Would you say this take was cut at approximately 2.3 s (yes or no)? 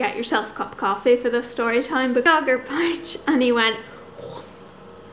yes